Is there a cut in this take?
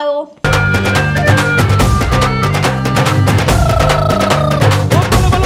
no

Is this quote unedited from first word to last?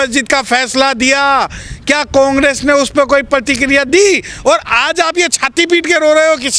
yes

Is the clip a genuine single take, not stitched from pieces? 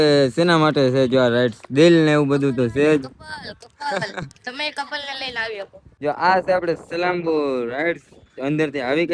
no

